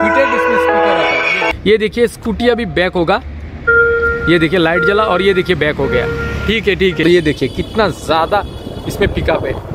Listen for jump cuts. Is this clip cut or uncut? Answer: cut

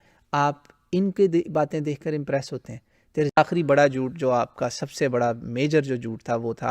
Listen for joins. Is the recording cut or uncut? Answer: cut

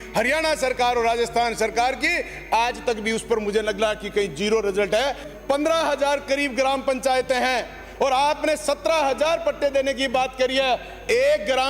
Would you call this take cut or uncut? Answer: cut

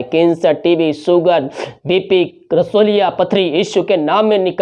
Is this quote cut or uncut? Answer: uncut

